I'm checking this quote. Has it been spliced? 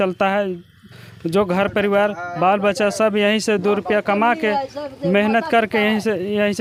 no; 0 cuts

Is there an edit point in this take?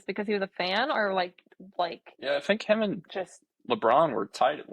yes; 1 cut; at 2.1 s

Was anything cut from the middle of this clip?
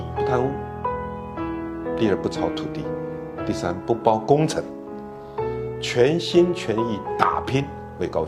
no; 0 cuts

